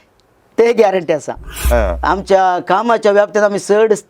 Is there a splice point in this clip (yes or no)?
yes